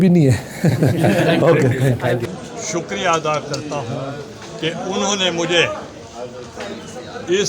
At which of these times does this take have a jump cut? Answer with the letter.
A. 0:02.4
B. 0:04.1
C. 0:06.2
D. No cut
A